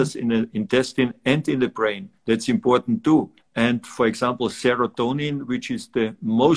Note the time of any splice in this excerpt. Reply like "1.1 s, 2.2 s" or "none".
2.1 s, 3.4 s

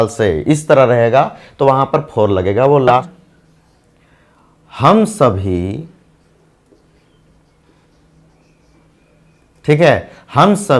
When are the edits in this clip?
2.9 s

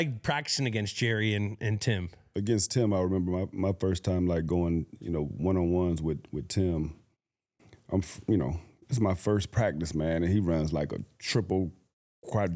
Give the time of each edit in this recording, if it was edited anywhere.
2.2 s

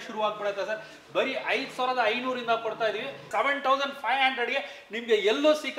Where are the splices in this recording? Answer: 3.3 s

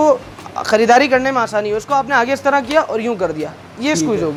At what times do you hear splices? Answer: none

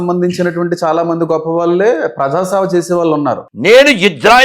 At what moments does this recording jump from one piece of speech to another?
3.5 s

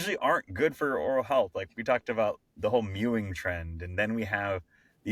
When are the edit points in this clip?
none

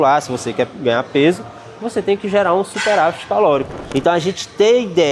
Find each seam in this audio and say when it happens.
3.8 s

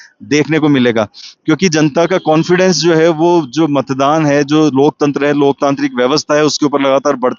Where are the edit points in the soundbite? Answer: none

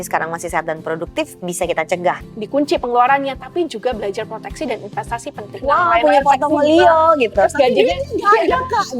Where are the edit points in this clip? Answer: 2.2 s, 5.6 s

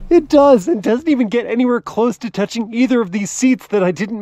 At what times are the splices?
none

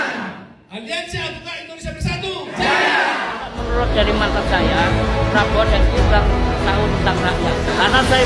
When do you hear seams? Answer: 3.5 s

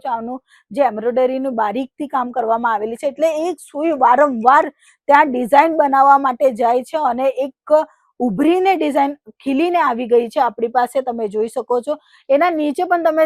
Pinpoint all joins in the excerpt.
none

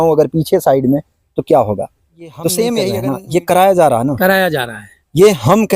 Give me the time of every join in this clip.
3.1 s

